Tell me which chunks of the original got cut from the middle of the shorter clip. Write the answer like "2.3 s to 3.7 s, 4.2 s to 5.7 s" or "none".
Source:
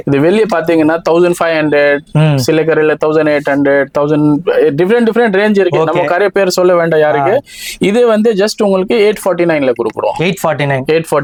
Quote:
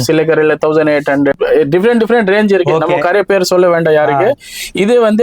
3.7 s to 4.4 s